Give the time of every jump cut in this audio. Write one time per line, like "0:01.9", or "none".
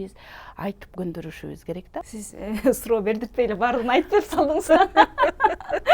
0:02.1